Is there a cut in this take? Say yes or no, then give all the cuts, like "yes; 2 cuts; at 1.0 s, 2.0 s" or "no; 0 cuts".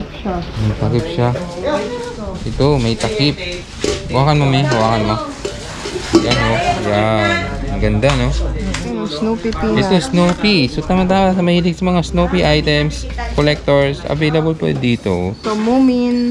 yes; 1 cut; at 8.9 s